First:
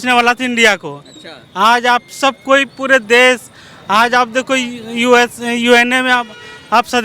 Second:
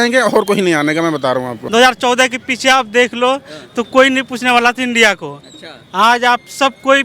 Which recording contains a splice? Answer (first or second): second